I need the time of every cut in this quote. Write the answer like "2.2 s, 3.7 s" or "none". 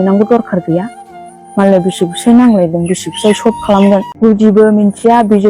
4.1 s